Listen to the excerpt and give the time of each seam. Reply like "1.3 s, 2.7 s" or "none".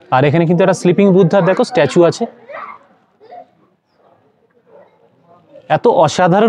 none

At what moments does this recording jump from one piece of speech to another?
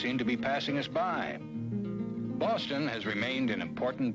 2.5 s

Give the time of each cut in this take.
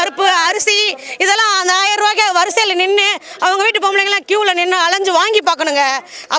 none

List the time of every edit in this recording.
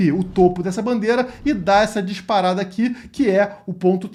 none

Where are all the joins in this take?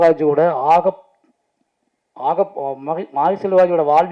none

